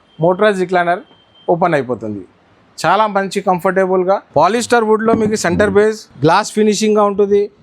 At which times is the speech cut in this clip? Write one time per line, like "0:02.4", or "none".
0:04.3
0:06.1